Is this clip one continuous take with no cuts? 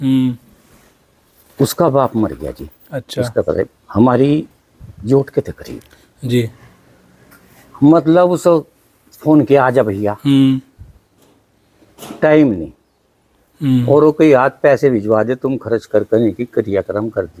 yes; 0 cuts

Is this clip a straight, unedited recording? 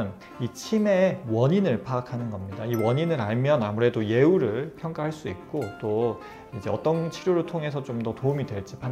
yes; 0 cuts

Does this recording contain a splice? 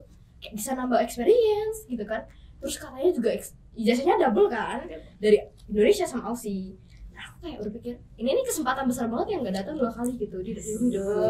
no; 0 cuts

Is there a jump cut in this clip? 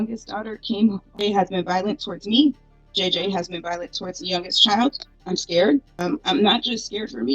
yes; 3 cuts; at 1.2 s, 5.1 s, 6.1 s

